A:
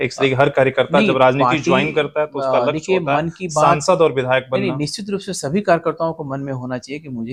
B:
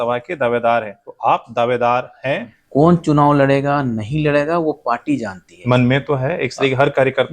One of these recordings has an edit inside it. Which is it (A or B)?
B